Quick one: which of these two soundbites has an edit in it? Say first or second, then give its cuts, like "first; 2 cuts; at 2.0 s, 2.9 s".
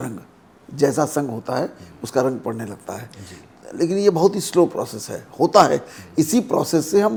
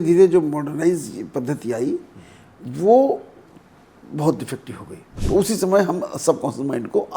second; 1 cut; at 5.2 s